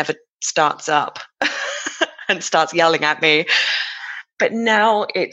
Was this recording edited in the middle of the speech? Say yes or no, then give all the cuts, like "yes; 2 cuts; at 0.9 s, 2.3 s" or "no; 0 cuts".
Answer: no; 0 cuts